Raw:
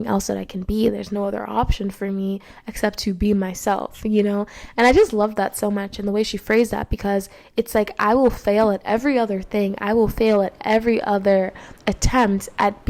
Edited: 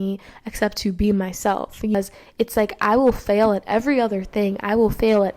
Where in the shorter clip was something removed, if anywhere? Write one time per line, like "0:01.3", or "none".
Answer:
0:01.9